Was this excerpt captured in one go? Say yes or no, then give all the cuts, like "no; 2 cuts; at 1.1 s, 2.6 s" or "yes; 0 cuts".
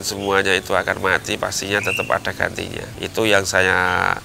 yes; 0 cuts